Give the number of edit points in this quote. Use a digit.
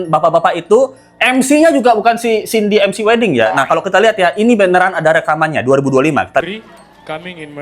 1